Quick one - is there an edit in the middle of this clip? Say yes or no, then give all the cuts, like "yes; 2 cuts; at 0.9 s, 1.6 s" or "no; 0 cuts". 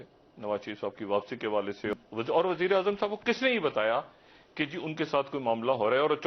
yes; 1 cut; at 1.9 s